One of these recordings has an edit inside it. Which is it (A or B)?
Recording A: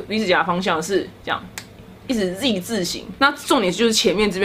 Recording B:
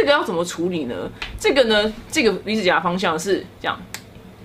A